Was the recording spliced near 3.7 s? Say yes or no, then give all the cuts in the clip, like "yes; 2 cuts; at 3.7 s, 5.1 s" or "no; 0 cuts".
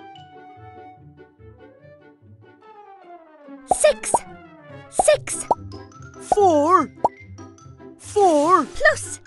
yes; 1 cut; at 3.7 s